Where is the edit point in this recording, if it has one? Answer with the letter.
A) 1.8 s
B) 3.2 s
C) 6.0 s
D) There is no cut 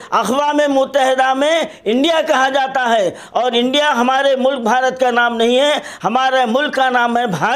D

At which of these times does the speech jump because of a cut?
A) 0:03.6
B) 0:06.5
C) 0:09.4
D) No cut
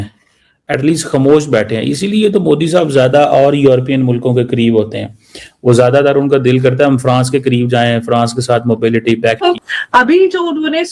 C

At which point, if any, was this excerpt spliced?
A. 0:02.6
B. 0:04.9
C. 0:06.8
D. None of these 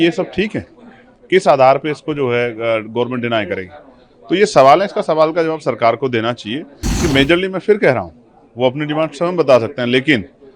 C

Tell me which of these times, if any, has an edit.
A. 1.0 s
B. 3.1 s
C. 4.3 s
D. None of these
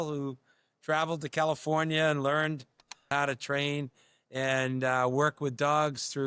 B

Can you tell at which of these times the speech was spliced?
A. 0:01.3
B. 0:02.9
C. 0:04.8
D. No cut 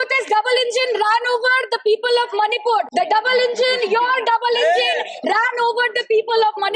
B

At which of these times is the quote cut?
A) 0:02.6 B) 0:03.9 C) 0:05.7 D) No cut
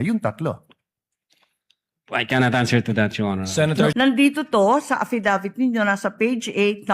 B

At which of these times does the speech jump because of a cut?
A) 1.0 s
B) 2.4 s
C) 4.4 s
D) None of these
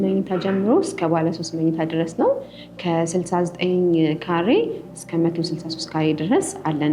D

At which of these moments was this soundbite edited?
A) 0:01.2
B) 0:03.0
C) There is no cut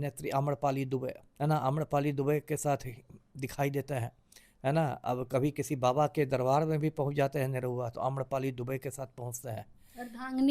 A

